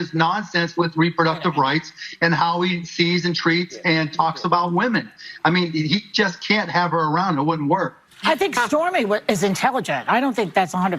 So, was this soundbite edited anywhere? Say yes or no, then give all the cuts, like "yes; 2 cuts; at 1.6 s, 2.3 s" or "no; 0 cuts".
no; 0 cuts